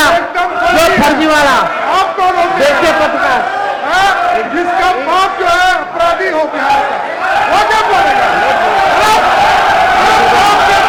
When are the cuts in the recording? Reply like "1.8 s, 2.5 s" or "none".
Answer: none